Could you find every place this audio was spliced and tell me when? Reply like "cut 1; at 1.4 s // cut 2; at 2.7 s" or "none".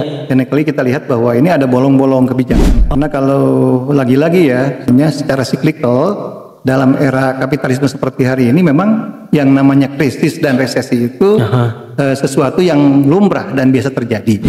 cut 1; at 2.6 s // cut 2; at 4.9 s